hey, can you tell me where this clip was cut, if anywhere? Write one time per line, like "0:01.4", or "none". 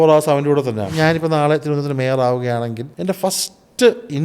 0:00.9
0:02.9